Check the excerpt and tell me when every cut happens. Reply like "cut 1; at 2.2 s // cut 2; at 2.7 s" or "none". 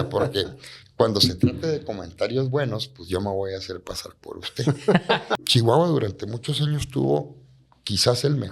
cut 1; at 5.3 s

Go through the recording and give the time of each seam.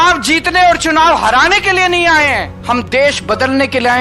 cut 1; at 2.5 s

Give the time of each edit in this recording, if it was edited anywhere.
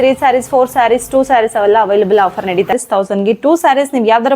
cut 1; at 2.7 s

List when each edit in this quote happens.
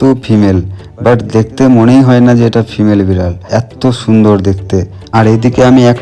cut 1; at 5.0 s

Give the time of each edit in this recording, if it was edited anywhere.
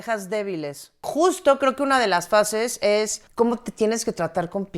cut 1; at 1.1 s

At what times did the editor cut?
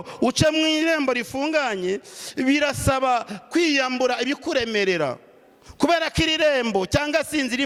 none

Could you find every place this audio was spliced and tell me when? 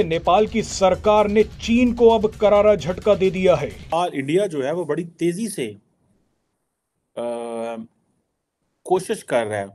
cut 1; at 3.8 s

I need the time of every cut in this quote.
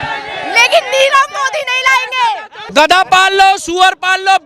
cut 1; at 2.6 s

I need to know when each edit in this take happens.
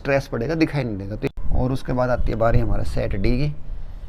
cut 1; at 1.3 s

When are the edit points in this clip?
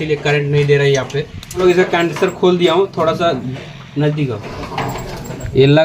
cut 1; at 1.6 s

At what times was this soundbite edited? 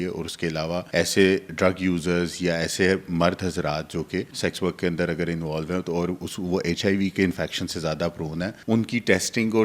cut 1; at 0.9 s // cut 2; at 4.3 s // cut 3; at 8.6 s

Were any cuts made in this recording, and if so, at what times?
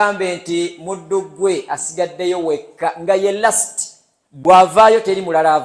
none

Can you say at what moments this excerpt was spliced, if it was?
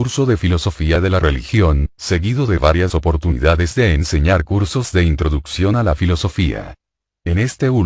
cut 1; at 6.2 s

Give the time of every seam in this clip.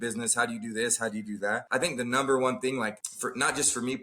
cut 1; at 1.6 s // cut 2; at 3.1 s

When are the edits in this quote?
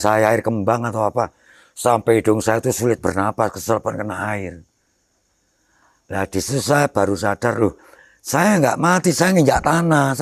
none

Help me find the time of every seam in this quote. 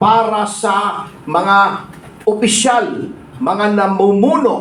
none

